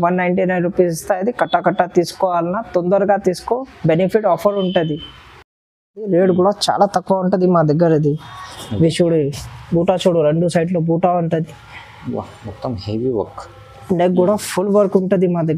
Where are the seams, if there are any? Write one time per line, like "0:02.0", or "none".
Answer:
none